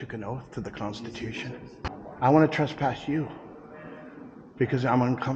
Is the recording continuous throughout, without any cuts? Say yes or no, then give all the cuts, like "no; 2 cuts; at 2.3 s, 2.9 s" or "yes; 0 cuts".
no; 1 cut; at 1.8 s